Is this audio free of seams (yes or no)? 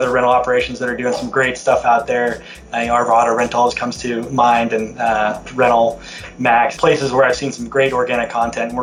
no